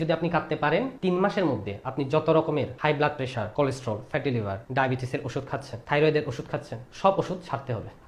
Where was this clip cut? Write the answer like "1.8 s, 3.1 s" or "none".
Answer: 0.9 s, 3.0 s, 4.6 s